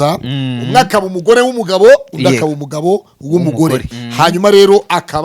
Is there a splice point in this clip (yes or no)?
yes